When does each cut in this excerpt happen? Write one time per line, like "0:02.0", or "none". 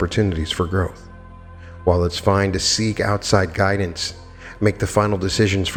none